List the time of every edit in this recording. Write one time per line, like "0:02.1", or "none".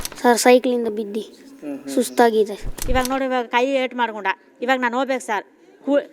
0:02.7